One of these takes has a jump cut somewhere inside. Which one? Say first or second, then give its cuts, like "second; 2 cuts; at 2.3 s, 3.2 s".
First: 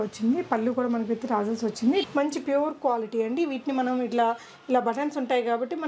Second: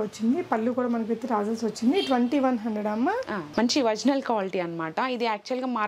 first; 1 cut; at 2.1 s